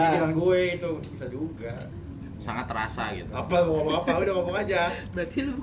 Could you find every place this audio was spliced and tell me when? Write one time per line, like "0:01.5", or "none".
0:01.9